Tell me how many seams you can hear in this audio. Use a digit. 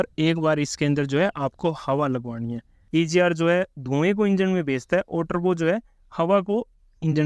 1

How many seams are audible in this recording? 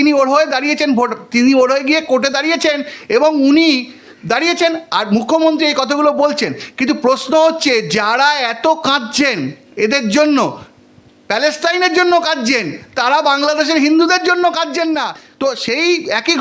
1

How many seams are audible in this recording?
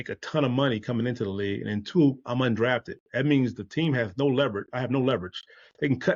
0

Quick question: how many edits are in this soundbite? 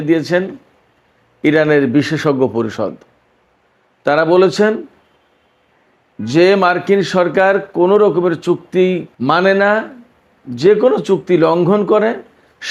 0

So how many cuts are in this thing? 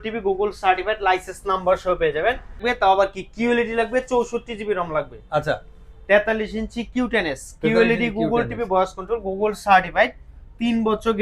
1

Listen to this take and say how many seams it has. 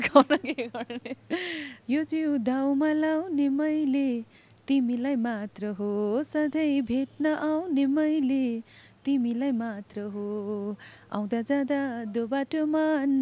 1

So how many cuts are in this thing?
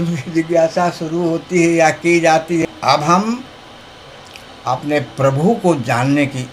1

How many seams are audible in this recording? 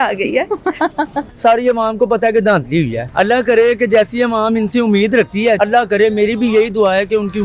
3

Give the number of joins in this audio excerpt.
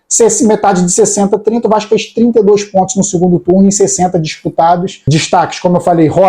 1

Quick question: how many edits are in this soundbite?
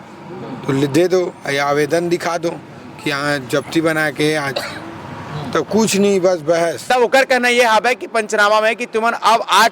1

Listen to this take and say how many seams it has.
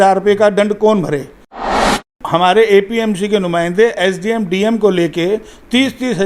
1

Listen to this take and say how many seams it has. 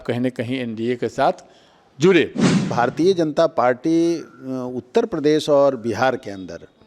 1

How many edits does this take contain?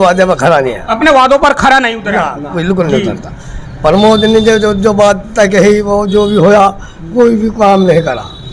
0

